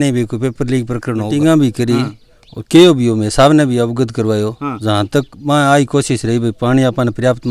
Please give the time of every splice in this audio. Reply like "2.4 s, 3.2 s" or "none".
1.3 s